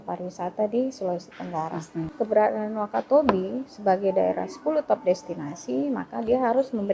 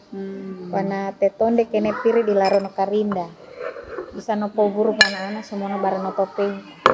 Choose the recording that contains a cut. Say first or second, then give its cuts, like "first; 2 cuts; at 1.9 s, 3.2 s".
first; 1 cut; at 2.1 s